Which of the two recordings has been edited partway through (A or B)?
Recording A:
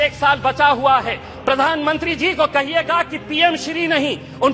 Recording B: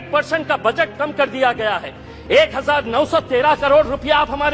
A